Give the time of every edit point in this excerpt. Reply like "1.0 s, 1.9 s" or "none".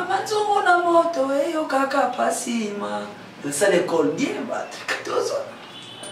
none